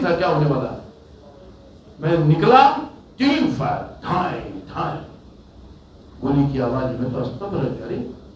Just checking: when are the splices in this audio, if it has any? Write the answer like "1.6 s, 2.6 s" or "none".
none